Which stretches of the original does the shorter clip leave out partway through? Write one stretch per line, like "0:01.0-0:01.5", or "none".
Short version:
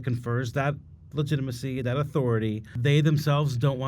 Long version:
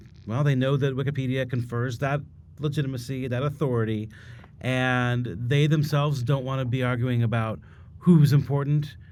0:04.2-0:05.4